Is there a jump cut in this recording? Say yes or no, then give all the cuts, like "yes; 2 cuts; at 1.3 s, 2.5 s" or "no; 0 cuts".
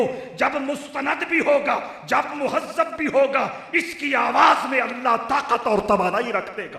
no; 0 cuts